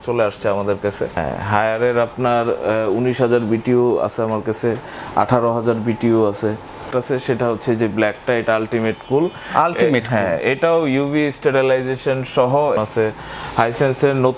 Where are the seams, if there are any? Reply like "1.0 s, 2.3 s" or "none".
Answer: 1.1 s, 6.9 s, 12.8 s

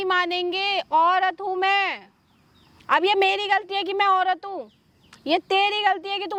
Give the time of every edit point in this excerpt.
none

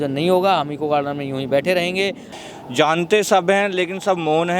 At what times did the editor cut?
2.3 s

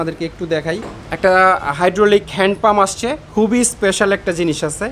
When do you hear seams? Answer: 1.0 s, 3.2 s

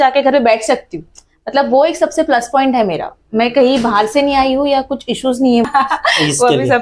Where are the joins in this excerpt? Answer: 5.7 s

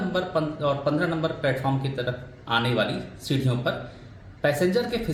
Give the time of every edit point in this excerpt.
none

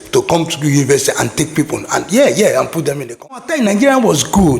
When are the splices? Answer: 3.4 s

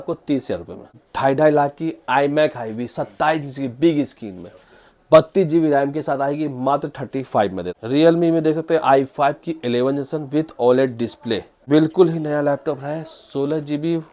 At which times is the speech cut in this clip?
1.0 s, 7.7 s, 11.5 s

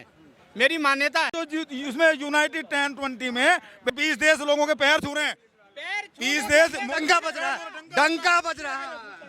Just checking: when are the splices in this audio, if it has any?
1.4 s, 3.9 s

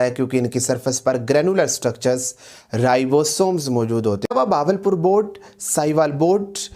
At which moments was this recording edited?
4.3 s

